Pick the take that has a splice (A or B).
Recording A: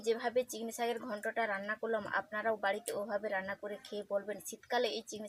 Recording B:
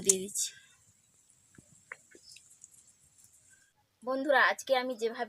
B